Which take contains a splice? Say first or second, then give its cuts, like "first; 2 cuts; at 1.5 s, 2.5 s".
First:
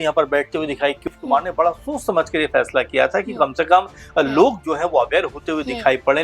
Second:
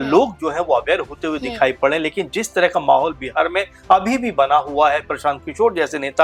first; 1 cut; at 1.0 s